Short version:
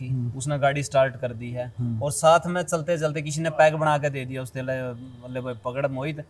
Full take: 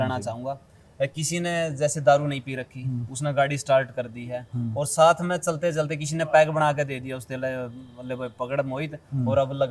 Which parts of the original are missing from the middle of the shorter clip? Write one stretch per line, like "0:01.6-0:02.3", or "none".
none

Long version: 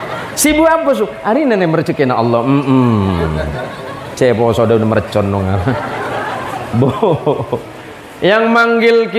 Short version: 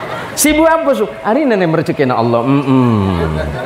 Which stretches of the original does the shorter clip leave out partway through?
none

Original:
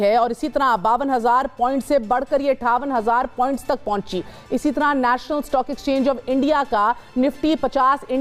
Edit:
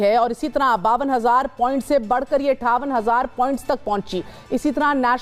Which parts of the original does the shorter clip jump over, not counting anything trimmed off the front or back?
none

